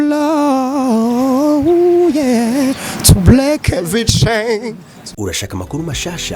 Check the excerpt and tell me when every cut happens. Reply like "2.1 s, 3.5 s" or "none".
5.0 s

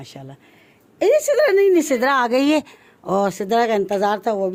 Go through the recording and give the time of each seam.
none

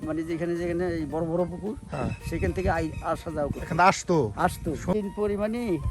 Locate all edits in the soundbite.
4.9 s

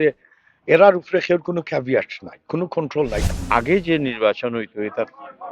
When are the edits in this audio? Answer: 3.2 s

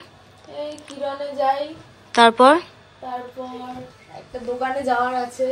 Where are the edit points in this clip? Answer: none

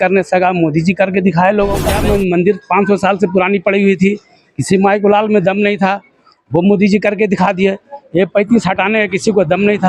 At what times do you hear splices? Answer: 1.9 s

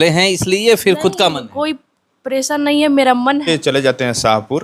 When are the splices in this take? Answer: 3.5 s

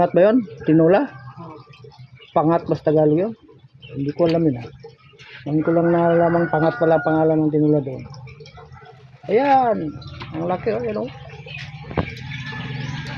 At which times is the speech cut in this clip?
none

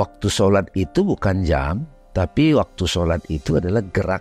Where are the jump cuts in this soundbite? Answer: none

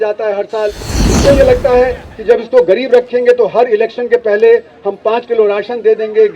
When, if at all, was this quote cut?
1.1 s

